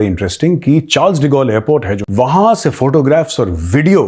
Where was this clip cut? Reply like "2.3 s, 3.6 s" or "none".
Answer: 2.0 s

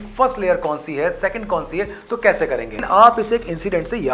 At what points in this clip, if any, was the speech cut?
2.8 s

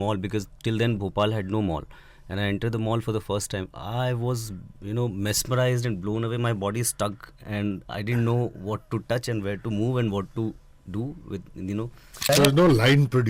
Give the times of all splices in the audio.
12.3 s

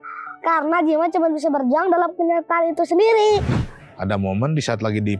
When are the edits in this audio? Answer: 3.5 s

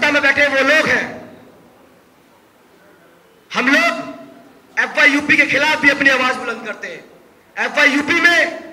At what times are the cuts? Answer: none

